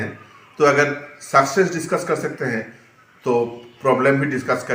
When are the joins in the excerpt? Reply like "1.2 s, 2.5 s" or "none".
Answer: none

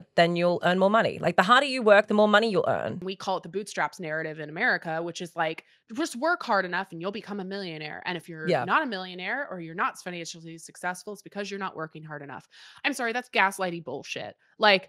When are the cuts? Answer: 3.1 s

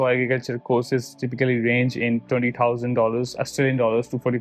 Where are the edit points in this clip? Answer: none

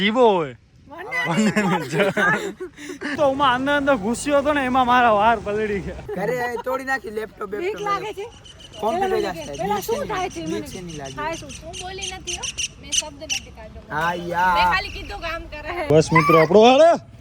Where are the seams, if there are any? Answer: 3.1 s, 6.4 s, 15.8 s

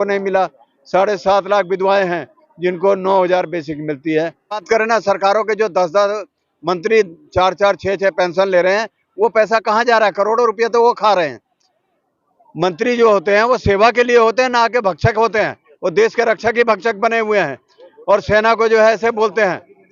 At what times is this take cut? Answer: 4.6 s

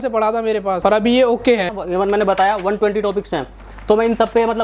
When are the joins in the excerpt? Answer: 0.8 s, 1.8 s

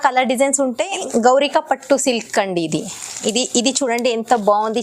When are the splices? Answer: 1.0 s

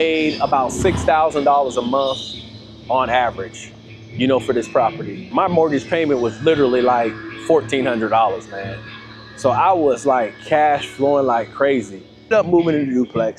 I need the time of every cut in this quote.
5.3 s, 12.3 s

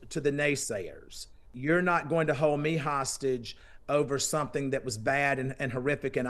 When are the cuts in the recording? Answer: 1.5 s

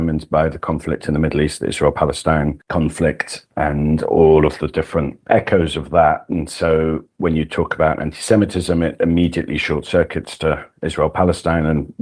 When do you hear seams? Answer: 2.6 s

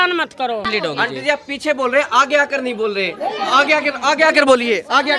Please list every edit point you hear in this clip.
1.1 s

